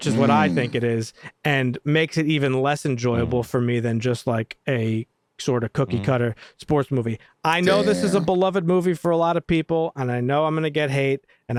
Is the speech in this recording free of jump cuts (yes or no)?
yes